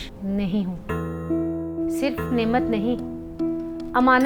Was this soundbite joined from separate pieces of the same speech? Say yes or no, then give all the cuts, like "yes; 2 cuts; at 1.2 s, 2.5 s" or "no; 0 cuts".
yes; 1 cut; at 1.7 s